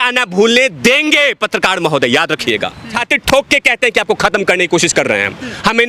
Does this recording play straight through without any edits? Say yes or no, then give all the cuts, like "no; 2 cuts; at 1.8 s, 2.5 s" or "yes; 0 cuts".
no; 1 cut; at 2.9 s